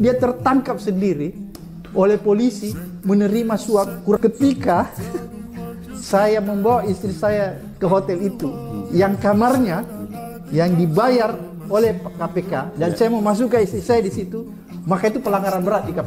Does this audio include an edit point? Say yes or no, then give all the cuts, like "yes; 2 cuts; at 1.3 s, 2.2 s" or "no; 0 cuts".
yes; 1 cut; at 4.2 s